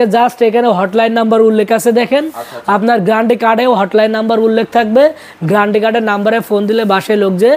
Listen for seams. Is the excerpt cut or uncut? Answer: uncut